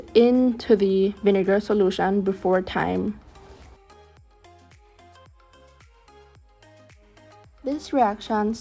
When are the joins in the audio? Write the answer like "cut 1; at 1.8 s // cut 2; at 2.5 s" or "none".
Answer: cut 1; at 3.3 s // cut 2; at 7.5 s